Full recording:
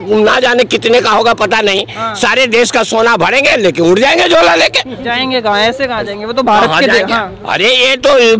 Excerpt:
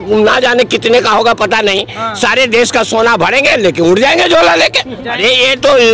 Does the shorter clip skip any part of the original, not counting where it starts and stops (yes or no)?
yes